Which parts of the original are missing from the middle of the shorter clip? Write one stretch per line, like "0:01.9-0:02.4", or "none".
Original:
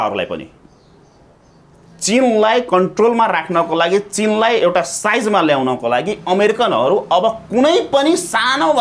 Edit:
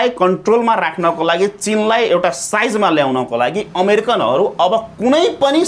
none